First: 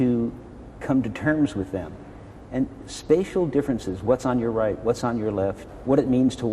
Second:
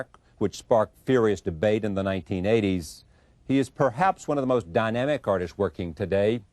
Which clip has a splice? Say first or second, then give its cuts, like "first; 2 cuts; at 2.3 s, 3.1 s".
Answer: first; 1 cut; at 4.8 s